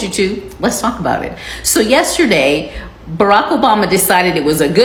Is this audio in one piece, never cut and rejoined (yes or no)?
yes